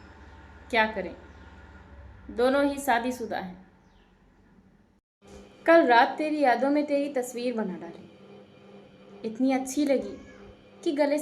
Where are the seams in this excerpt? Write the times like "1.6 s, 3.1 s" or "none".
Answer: 5.1 s